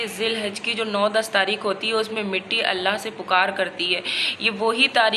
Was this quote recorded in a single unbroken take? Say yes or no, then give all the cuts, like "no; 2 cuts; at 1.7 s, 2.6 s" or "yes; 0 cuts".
yes; 0 cuts